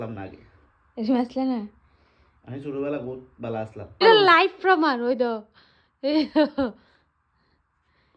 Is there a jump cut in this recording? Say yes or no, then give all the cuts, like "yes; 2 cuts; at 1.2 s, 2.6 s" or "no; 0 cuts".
yes; 1 cut; at 3.9 s